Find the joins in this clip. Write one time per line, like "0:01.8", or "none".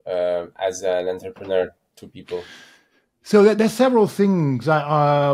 none